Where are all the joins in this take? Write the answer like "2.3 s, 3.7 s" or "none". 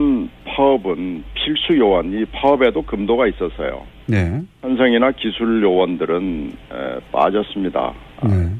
none

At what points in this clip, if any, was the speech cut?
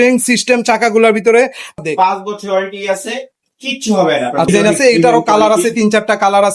1.8 s, 4.5 s

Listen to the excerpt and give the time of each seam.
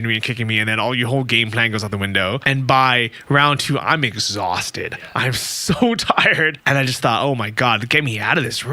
2.4 s, 6.6 s

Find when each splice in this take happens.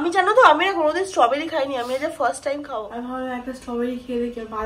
2.8 s

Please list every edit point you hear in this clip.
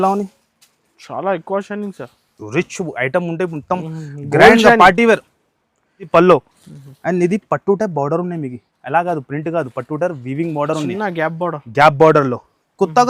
6.1 s

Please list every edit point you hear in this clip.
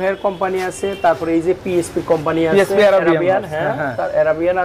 none

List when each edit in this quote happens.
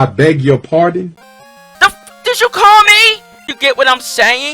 3.5 s

